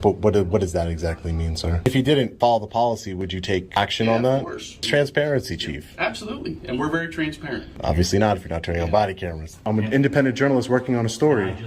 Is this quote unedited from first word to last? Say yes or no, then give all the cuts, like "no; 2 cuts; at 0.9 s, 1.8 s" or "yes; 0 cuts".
no; 5 cuts; at 1.9 s, 3.8 s, 4.8 s, 7.7 s, 9.6 s